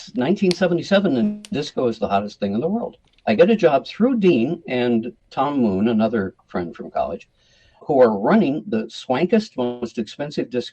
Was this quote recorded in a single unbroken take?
no; 3 cuts; at 3.1 s, 5.2 s, 7.8 s

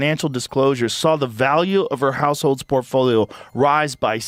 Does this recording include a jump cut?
no; 0 cuts

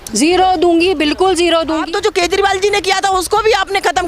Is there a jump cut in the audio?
yes; 1 cut; at 1.8 s

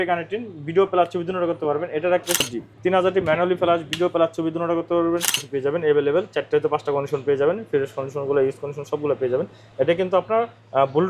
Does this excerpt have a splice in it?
yes; 2 cuts; at 2.4 s, 5.5 s

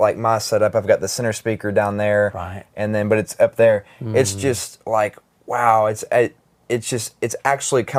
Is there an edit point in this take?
no; 0 cuts

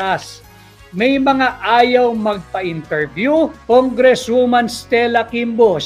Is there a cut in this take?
yes; 1 cut; at 3.6 s

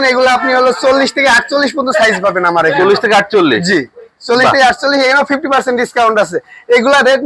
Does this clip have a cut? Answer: no; 0 cuts

